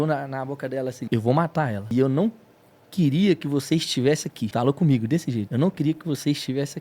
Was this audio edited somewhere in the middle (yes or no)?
yes